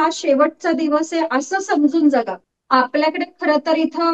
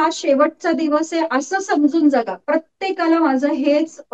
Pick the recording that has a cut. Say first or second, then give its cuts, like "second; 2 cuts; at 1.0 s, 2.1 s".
first; 1 cut; at 2.4 s